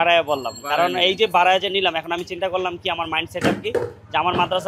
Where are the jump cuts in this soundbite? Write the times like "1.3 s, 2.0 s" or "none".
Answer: none